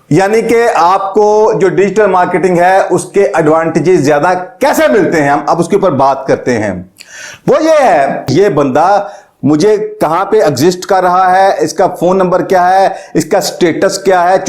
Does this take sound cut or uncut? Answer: cut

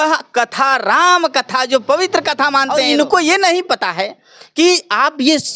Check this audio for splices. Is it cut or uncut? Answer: cut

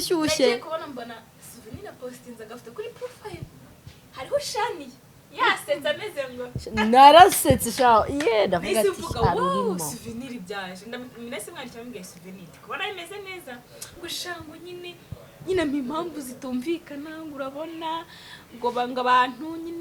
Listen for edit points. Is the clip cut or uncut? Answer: uncut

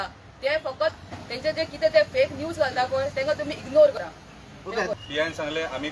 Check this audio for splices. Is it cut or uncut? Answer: cut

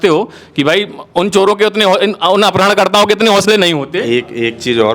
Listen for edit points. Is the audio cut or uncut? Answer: uncut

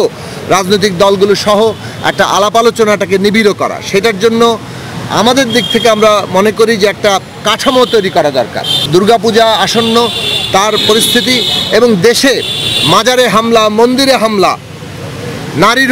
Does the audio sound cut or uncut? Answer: cut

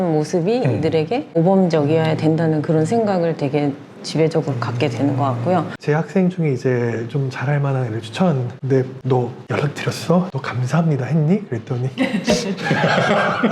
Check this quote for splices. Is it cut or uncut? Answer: cut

